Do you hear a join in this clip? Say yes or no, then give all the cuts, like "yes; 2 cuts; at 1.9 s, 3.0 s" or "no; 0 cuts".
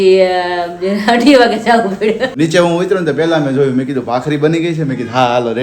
yes; 1 cut; at 2.3 s